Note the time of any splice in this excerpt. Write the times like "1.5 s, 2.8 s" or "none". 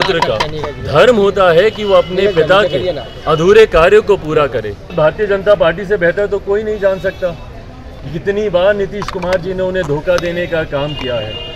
4.9 s